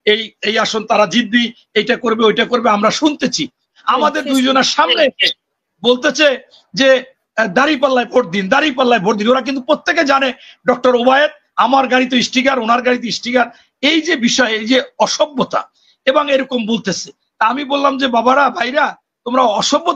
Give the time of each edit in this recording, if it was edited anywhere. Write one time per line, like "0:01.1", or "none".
0:03.7